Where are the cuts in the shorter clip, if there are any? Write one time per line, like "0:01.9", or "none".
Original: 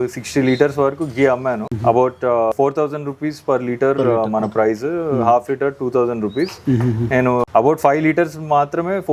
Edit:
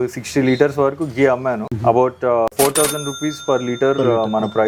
none